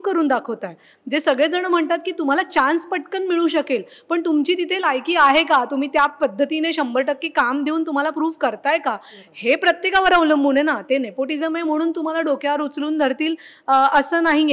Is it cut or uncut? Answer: uncut